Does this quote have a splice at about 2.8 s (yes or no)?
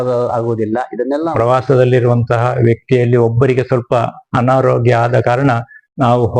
no